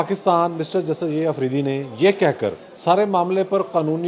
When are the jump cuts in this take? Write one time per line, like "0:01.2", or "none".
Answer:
0:02.7